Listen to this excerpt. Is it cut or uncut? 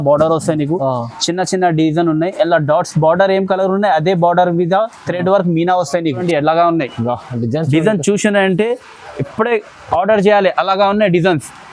cut